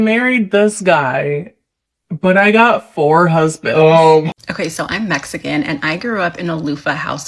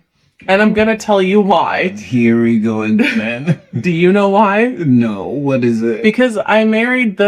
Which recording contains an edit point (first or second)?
first